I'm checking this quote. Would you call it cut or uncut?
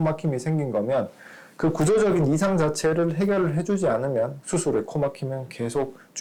uncut